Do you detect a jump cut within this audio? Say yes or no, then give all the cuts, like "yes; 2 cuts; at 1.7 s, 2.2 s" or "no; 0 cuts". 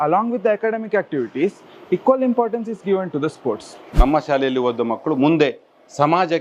yes; 1 cut; at 4.0 s